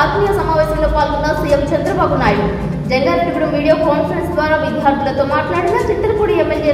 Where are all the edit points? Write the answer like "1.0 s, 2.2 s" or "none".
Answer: none